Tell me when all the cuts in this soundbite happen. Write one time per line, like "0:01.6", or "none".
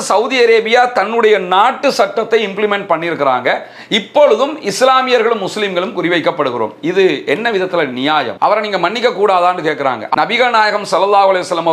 none